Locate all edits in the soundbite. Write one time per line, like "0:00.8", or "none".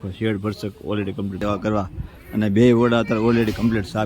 0:01.4